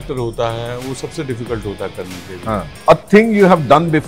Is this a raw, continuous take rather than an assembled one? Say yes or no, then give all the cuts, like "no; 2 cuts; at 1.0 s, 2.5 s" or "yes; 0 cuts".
no; 1 cut; at 2.7 s